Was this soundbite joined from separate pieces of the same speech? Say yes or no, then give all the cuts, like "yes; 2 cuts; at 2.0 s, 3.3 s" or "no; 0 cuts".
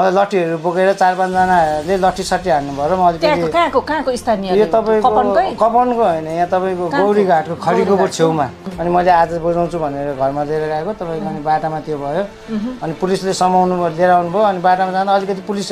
yes; 1 cut; at 8.6 s